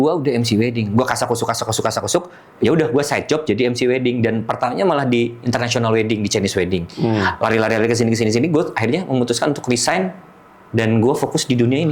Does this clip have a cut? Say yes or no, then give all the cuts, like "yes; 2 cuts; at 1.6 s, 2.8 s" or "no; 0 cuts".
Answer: no; 0 cuts